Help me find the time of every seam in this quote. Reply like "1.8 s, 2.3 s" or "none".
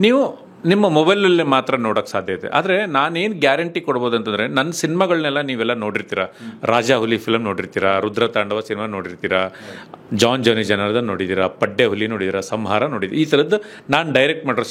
none